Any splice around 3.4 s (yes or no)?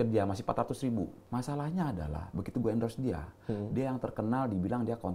no